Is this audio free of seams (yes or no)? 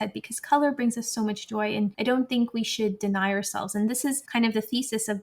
no